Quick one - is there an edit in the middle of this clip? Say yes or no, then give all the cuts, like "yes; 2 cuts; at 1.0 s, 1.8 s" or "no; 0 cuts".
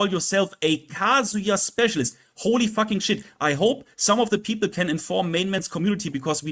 no; 0 cuts